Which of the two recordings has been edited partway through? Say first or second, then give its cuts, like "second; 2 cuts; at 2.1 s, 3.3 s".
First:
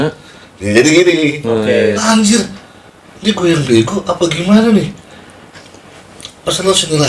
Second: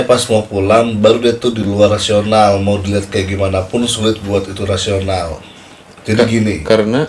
first; 1 cut; at 2.0 s